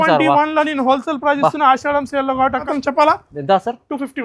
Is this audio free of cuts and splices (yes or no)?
no